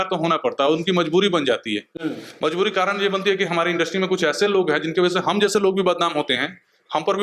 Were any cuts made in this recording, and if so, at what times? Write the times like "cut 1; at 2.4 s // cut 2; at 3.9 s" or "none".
none